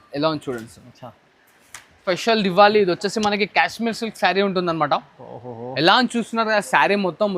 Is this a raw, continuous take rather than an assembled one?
no; 1 cut; at 2.0 s

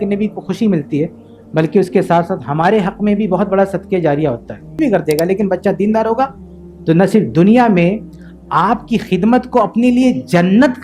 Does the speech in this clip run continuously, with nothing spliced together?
no; 1 cut; at 4.8 s

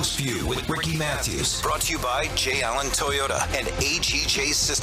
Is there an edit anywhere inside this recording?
yes; 1 cut; at 3.5 s

